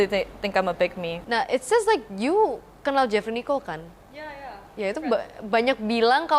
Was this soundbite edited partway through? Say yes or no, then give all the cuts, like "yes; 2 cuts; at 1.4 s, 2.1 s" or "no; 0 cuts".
yes; 1 cut; at 1.1 s